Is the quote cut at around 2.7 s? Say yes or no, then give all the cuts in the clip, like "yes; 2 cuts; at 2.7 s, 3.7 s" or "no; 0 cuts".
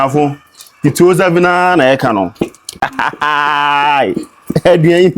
yes; 1 cut; at 2.7 s